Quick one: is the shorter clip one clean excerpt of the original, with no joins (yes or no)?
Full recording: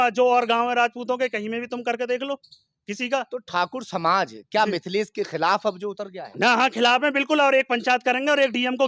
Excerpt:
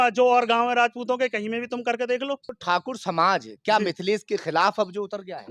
no